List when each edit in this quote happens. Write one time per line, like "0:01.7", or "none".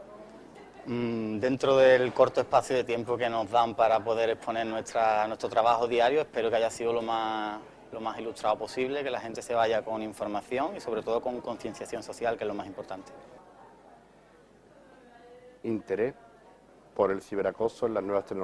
none